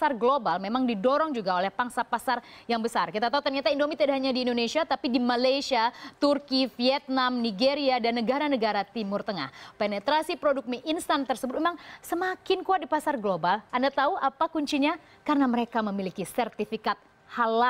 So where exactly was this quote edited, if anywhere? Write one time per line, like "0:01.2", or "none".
none

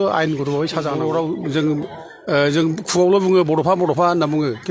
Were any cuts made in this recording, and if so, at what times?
0:00.9

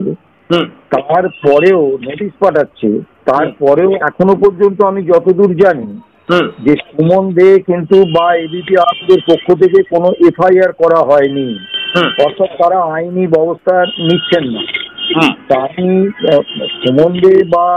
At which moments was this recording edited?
none

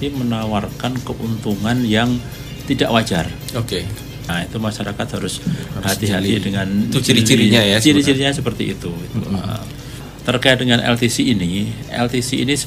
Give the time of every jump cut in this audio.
0:04.3
0:10.0

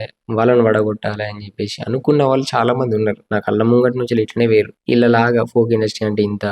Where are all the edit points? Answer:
0:04.8

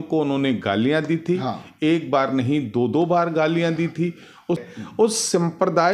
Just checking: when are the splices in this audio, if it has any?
0:01.7
0:04.6

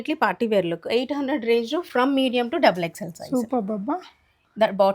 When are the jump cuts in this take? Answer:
none

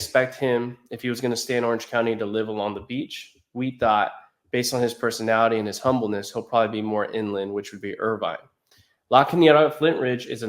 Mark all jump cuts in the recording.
none

